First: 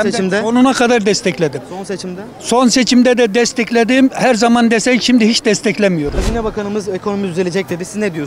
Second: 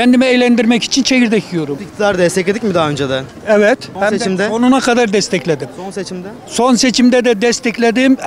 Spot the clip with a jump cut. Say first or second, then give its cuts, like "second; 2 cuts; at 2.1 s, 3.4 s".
first; 1 cut; at 6.2 s